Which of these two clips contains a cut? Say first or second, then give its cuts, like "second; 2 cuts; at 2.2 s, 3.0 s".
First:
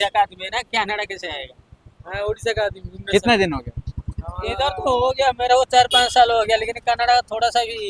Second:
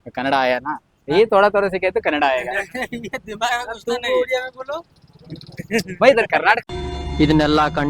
second; 1 cut; at 6.6 s